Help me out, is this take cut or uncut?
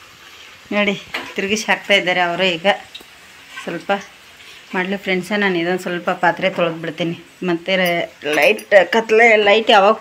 uncut